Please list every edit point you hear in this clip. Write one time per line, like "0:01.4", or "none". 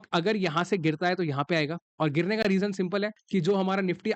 0:03.2